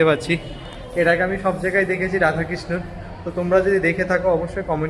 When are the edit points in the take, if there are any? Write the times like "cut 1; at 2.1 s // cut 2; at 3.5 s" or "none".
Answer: none